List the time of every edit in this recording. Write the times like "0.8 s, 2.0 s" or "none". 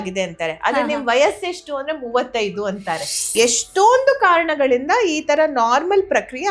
3.2 s